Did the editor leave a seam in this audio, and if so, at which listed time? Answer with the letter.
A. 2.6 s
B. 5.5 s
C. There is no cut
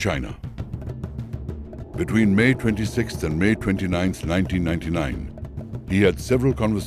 A